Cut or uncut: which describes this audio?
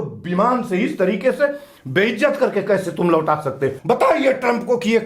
cut